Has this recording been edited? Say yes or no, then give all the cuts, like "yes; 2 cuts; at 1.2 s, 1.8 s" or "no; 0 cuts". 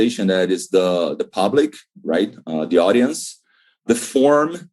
yes; 1 cut; at 3.8 s